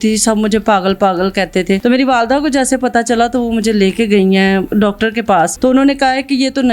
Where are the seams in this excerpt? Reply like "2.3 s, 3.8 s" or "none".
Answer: 1.8 s, 5.1 s